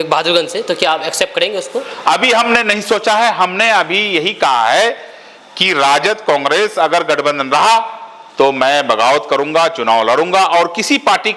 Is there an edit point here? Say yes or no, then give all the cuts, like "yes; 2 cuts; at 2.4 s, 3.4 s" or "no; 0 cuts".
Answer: no; 0 cuts